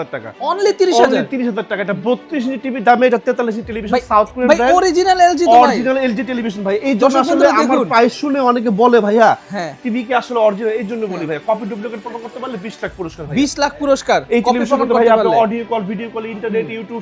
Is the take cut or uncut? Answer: uncut